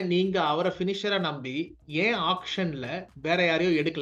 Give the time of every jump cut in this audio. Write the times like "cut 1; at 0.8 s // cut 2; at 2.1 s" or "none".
none